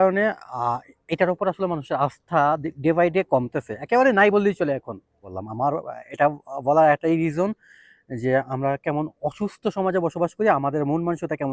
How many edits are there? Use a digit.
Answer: 1